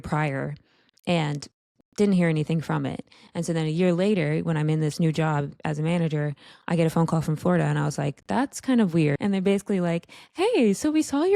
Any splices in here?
yes; 1 cut; at 9.2 s

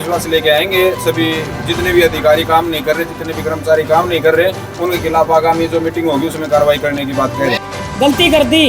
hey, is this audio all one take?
no; 1 cut; at 7.6 s

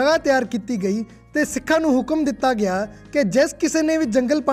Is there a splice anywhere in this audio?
no; 0 cuts

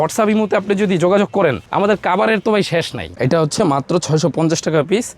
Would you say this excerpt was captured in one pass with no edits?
no; 1 cut; at 3.1 s

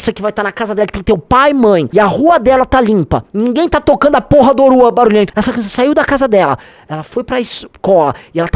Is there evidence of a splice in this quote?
yes; 2 cuts; at 1.9 s, 5.3 s

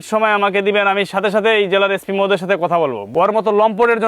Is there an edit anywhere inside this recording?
yes; 1 cut; at 3.0 s

